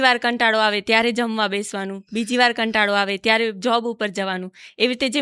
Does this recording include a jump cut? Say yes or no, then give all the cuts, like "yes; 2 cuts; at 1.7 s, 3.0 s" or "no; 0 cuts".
no; 0 cuts